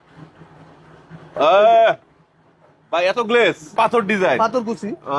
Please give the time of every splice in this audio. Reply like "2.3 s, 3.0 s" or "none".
3.7 s